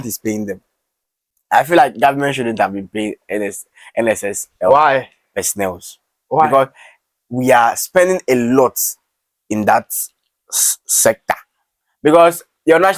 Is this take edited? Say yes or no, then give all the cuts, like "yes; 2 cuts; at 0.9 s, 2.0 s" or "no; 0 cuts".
no; 0 cuts